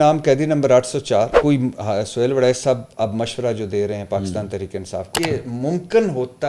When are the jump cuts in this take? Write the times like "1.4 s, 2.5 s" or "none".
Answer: 1.4 s, 5.1 s